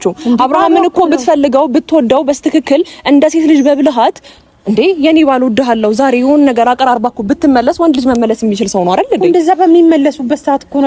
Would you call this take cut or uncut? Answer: uncut